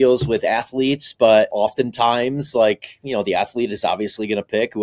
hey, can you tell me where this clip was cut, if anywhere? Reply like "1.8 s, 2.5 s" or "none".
1.5 s